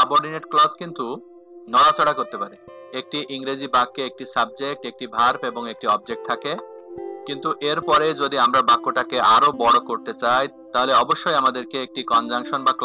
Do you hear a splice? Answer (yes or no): yes